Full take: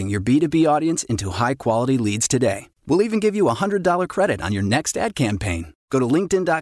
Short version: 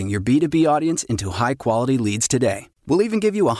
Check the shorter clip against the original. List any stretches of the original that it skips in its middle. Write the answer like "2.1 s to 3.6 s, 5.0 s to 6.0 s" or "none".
none